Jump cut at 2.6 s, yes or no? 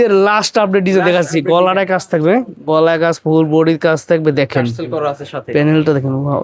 no